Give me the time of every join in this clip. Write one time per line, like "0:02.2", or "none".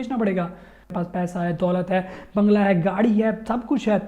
0:00.9